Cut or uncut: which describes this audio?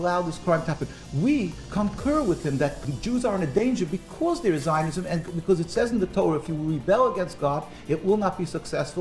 cut